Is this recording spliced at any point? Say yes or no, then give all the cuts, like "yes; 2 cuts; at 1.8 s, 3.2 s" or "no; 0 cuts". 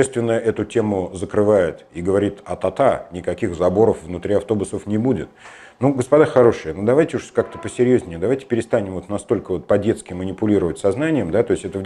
no; 0 cuts